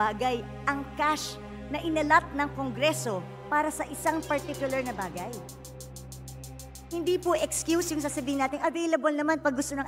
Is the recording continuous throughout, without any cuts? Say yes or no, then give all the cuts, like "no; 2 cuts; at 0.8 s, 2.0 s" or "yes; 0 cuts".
yes; 0 cuts